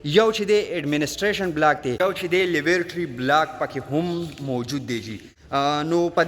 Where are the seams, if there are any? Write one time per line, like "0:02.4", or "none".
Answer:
0:02.0
0:05.4